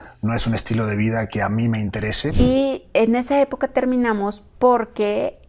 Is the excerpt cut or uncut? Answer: cut